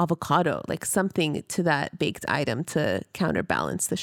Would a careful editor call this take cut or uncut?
uncut